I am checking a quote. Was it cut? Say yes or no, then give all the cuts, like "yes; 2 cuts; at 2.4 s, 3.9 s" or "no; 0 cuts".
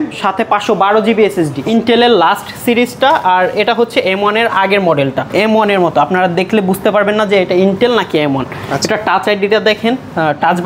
yes; 2 cuts; at 1.6 s, 5.3 s